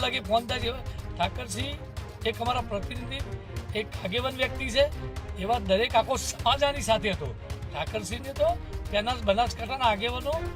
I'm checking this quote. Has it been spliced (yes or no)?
no